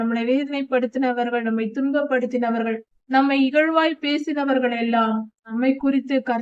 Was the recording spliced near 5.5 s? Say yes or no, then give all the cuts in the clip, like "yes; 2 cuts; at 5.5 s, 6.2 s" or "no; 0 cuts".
yes; 1 cut; at 5.5 s